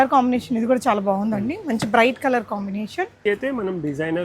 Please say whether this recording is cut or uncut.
uncut